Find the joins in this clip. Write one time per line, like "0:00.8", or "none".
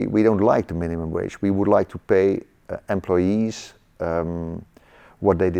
none

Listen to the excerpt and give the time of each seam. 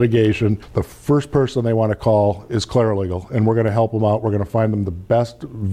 none

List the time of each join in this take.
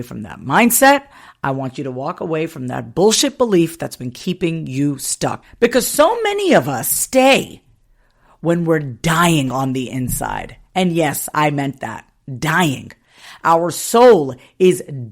0:05.5

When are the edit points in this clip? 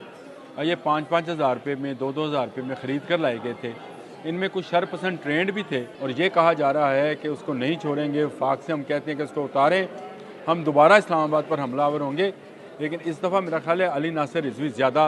0:06.0

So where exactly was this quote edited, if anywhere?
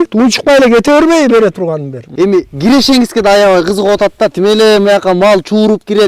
0:02.0

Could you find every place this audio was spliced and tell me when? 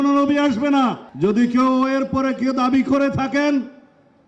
0:01.1

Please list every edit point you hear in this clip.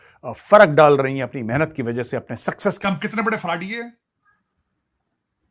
0:02.8

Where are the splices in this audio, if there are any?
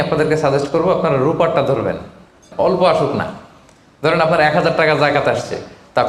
0:02.5

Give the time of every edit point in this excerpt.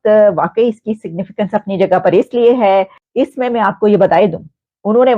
0:03.0

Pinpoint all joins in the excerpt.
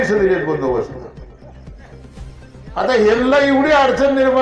0:01.1
0:02.7

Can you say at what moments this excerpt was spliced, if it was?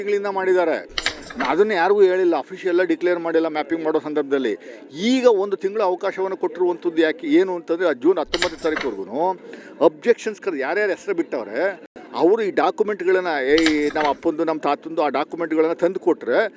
none

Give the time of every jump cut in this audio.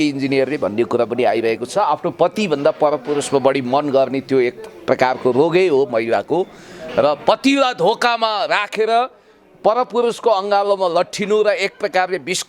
0:01.7

